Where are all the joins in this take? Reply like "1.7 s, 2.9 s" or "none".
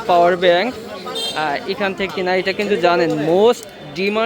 2.1 s